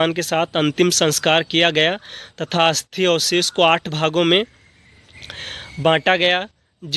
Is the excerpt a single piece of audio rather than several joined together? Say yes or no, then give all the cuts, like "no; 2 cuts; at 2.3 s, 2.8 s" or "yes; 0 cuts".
yes; 0 cuts